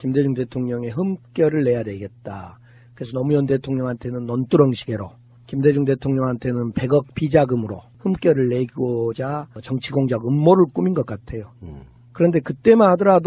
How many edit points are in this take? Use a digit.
1